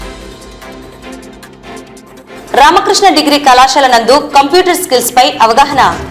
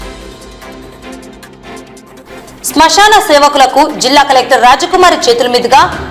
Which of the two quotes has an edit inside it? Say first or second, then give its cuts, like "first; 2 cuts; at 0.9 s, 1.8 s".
first; 1 cut; at 2.2 s